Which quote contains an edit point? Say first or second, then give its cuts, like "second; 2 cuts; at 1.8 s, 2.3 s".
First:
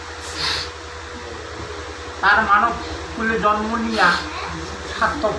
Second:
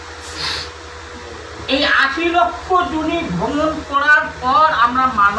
second; 1 cut; at 1.7 s